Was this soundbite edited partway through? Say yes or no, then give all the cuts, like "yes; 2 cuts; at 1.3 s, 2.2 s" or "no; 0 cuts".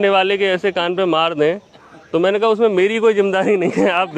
no; 0 cuts